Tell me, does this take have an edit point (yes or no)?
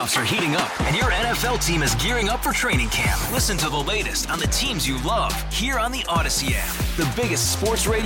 no